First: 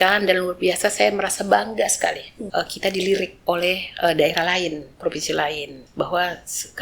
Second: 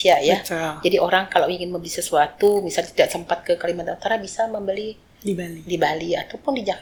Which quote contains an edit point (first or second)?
first